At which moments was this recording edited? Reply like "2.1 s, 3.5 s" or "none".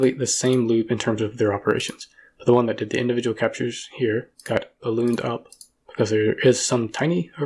none